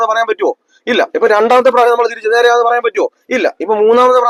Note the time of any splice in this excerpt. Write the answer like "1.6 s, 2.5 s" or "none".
none